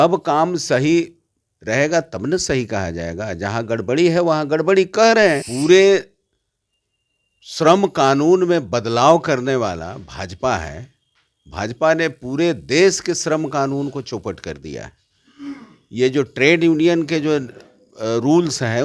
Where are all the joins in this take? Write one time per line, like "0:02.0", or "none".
0:05.5